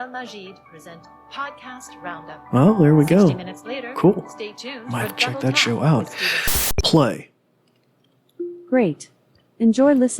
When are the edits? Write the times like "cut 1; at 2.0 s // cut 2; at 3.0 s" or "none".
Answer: cut 1; at 6.6 s